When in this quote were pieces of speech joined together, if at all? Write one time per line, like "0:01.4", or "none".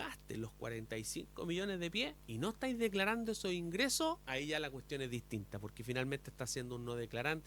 0:02.2
0:04.2

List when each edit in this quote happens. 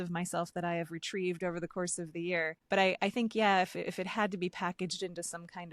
0:02.6

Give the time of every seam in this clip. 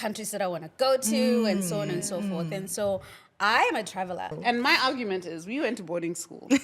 0:04.3

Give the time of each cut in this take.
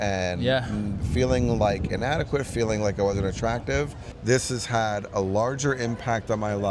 0:04.0

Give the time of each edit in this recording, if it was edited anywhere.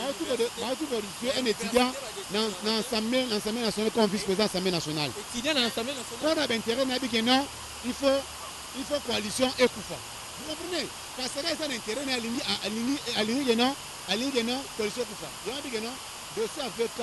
none

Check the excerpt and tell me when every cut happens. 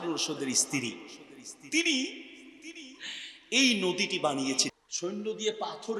0:04.7

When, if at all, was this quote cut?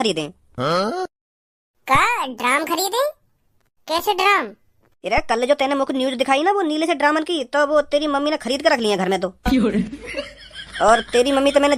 none

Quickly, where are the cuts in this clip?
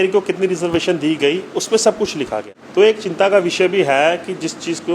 0:02.5

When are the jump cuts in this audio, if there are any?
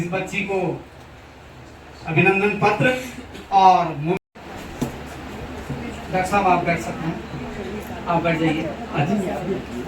0:04.2

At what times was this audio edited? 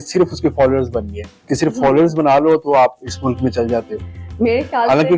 0:01.3

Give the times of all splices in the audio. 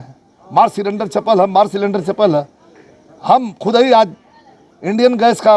none

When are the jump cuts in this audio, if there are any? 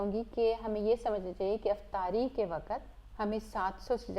0:03.0

